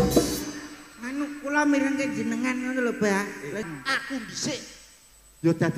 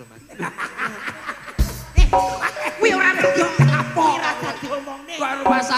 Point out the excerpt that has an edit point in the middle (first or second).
first